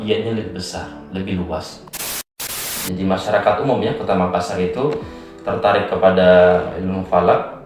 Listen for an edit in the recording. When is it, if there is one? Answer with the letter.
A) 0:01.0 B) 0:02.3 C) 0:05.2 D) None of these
B